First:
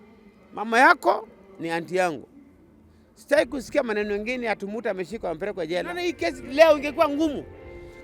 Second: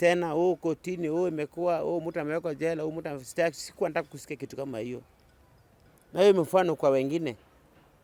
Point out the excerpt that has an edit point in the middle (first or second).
first